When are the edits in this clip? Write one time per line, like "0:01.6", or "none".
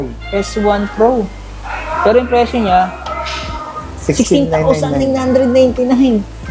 none